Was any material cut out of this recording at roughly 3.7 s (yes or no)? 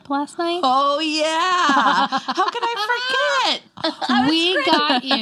yes